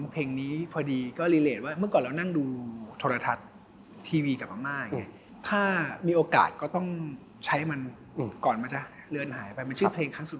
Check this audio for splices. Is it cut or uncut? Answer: cut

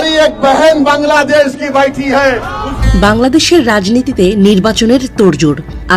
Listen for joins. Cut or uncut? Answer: cut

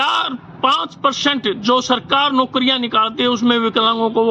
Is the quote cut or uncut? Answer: uncut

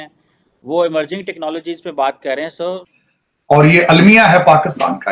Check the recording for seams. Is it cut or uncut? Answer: cut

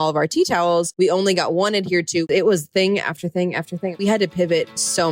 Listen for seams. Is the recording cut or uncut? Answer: cut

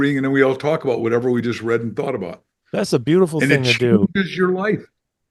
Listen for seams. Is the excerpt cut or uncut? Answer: uncut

